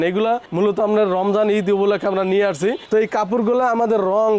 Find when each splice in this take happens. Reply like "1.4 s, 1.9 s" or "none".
none